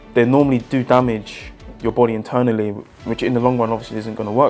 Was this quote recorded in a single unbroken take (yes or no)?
no